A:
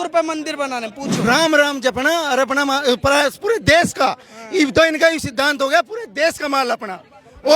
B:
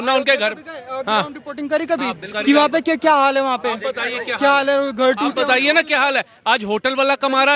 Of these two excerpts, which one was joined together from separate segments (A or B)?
A